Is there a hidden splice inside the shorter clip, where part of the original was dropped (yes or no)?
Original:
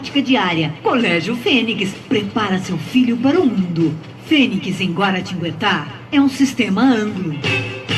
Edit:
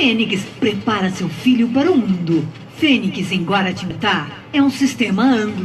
yes